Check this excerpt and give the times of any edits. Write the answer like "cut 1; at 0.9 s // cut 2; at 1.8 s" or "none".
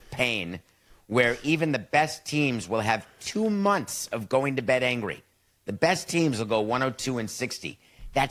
none